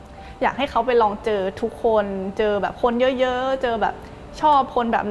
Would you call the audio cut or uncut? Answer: uncut